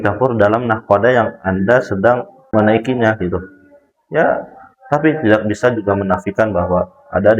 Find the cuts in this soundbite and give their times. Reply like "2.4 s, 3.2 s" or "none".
2.4 s